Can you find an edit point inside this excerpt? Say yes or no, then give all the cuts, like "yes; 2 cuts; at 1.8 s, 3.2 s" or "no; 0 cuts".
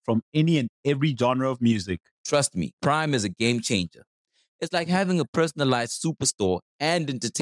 no; 0 cuts